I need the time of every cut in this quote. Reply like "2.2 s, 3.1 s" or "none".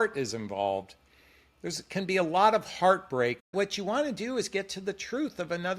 3.5 s